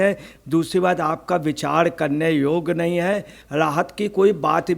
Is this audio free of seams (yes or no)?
no